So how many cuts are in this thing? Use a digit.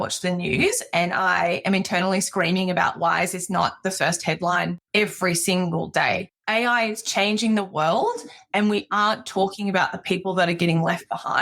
2